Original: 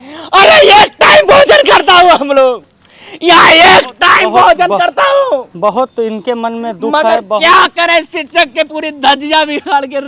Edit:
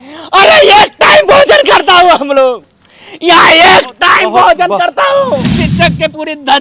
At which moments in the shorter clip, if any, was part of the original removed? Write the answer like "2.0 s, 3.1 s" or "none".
5.5 s